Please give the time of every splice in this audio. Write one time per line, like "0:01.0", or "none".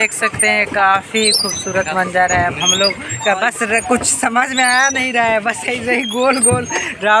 none